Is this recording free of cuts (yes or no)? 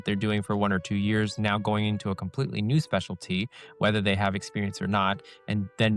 yes